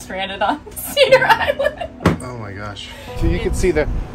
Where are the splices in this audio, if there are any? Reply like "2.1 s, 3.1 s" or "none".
3.0 s